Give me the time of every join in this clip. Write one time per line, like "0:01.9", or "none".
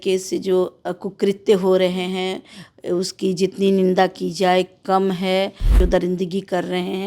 0:05.8